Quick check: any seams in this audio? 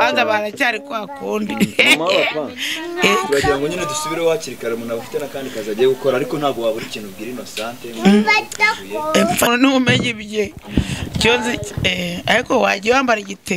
yes; 1 cut; at 9.5 s

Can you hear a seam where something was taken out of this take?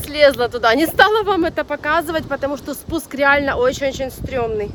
no; 0 cuts

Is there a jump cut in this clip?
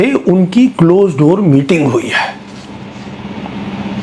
no; 0 cuts

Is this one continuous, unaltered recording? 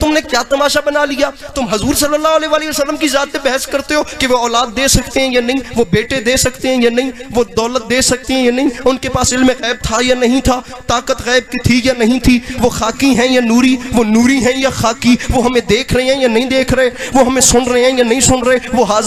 yes; 0 cuts

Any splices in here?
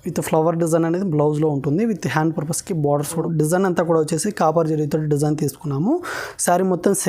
yes; 1 cut; at 3.2 s

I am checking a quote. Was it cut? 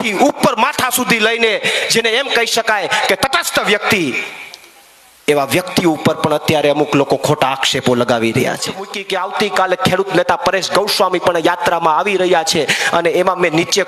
yes; 1 cut; at 9.0 s

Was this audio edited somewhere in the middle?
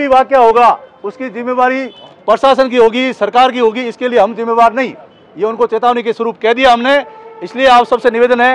no; 0 cuts

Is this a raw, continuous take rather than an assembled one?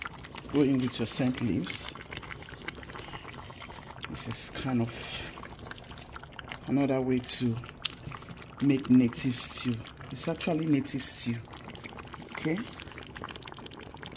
yes; 0 cuts

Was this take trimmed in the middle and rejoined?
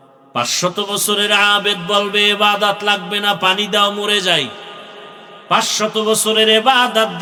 no; 0 cuts

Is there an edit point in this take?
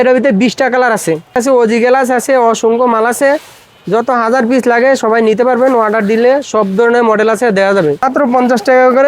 yes; 2 cuts; at 1.3 s, 8.0 s

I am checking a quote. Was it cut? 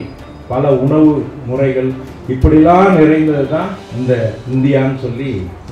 yes; 1 cut; at 3.8 s

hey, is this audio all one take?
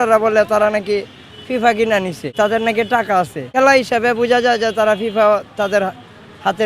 no; 2 cuts; at 2.2 s, 3.5 s

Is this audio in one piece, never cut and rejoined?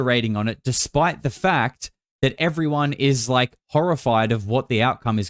yes; 0 cuts

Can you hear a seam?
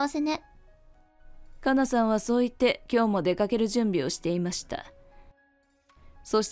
yes; 1 cut; at 5.4 s

